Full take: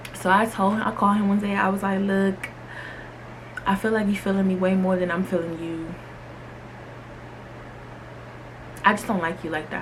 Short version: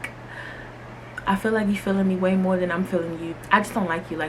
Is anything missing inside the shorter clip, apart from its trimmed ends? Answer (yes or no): yes